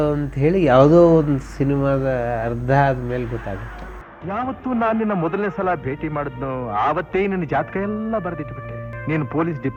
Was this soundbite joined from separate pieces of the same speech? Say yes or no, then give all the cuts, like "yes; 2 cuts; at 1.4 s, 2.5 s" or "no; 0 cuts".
no; 0 cuts